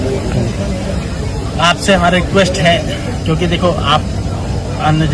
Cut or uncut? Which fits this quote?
uncut